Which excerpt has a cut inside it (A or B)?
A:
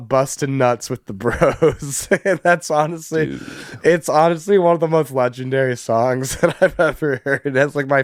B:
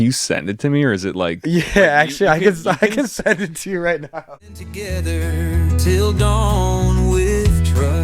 B